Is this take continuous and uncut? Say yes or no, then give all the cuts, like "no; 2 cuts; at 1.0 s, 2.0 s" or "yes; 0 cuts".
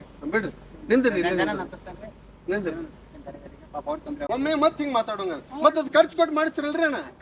no; 1 cut; at 4.1 s